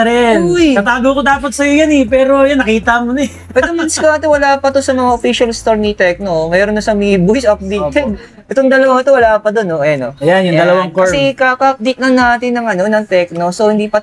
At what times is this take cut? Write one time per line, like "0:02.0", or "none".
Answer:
none